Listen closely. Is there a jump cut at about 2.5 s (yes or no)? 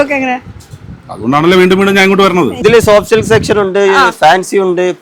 yes